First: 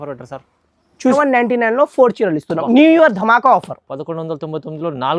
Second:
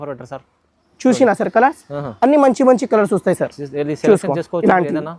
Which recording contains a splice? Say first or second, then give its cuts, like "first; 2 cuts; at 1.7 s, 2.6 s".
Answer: first; 1 cut; at 1.1 s